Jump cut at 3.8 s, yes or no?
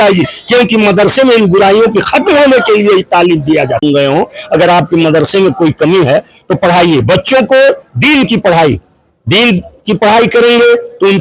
yes